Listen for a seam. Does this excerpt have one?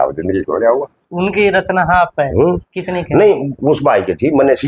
no; 0 cuts

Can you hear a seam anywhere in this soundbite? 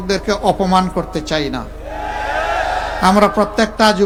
no; 0 cuts

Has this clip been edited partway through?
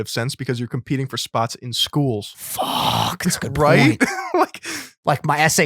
yes; 1 cut; at 2.4 s

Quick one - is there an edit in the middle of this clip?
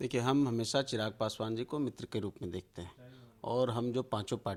no; 0 cuts

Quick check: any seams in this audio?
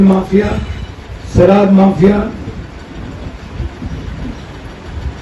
no; 0 cuts

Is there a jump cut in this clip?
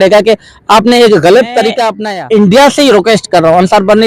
yes; 1 cut; at 1.9 s

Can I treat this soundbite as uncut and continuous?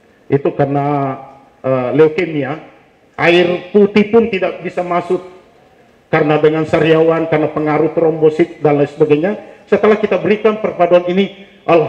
yes; 0 cuts

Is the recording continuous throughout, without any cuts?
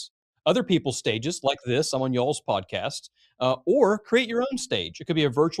yes; 0 cuts

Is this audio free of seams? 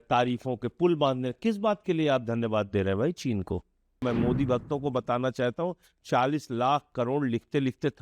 no; 1 cut; at 4.0 s

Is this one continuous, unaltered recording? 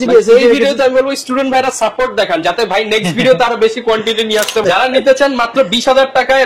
no; 1 cut; at 4.6 s

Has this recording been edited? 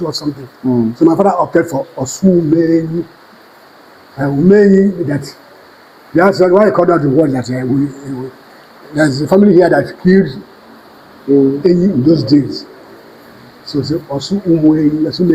no; 0 cuts

